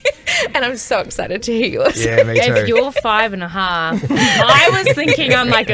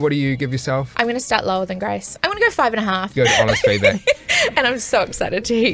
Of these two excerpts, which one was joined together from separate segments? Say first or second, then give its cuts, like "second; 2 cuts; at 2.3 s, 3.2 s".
second; 3 cuts; at 0.9 s, 2.1 s, 3.1 s